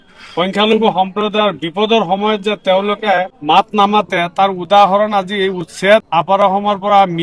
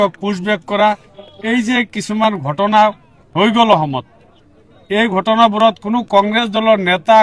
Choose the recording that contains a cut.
first; 2 cuts; at 3.3 s, 6.1 s

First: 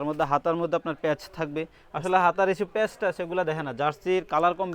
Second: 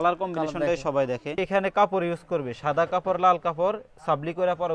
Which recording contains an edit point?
second; 1 cut; at 1.4 s

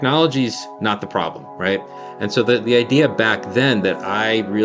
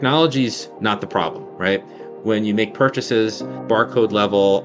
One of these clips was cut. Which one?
first; 1 cut; at 2.0 s

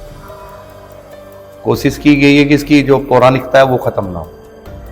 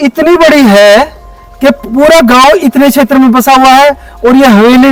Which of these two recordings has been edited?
first; 1 cut; at 1.3 s

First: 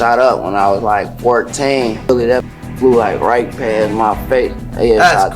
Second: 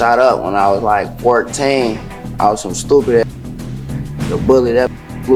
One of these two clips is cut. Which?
first; 1 cut; at 2.1 s

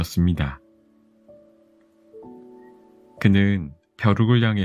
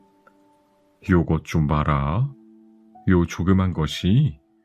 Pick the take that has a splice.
first; 2 cuts; at 1.2 s, 3.2 s

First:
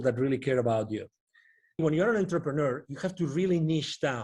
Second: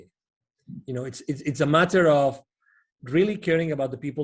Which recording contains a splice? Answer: first; 1 cut; at 1.8 s

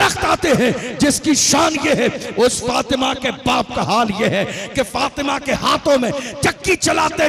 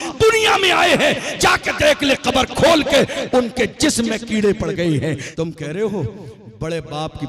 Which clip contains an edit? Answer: second; 1 cut; at 5.3 s

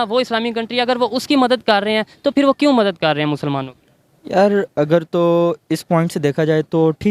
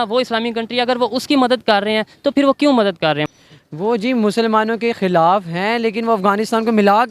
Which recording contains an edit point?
second; 1 cut; at 3.3 s

